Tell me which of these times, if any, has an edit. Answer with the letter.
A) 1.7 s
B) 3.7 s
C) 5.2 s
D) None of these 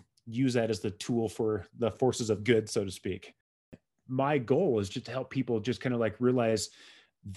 B